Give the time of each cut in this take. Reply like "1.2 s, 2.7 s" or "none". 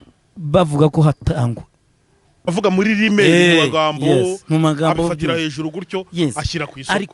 2.5 s